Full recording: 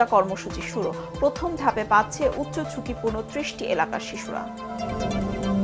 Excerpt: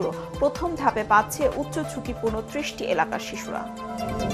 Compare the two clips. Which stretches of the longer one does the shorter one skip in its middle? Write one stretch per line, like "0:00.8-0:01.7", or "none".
none